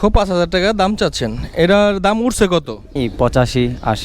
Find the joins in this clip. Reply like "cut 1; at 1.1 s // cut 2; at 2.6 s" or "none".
cut 1; at 2.8 s

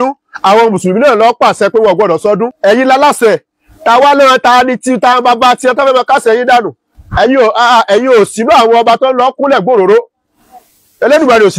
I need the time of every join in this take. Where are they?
cut 1; at 2.5 s // cut 2; at 6.8 s

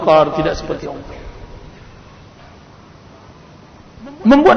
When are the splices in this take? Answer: cut 1; at 2.2 s

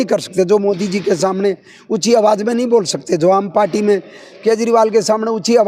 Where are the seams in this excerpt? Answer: none

